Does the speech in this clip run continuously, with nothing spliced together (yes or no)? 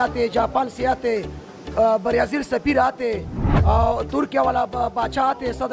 yes